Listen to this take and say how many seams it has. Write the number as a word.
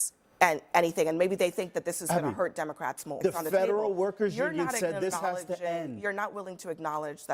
one